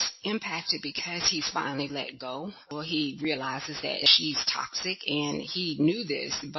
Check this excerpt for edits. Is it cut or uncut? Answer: cut